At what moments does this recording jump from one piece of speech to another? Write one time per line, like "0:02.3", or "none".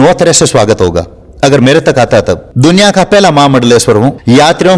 0:02.5